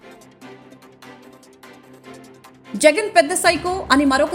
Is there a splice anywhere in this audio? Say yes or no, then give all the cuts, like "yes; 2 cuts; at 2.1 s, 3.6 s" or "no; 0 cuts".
yes; 1 cut; at 1.4 s